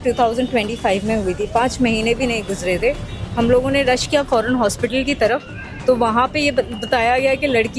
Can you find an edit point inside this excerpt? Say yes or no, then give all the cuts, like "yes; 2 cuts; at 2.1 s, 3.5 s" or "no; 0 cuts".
no; 0 cuts